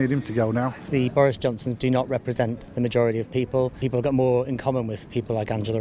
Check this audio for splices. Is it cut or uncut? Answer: cut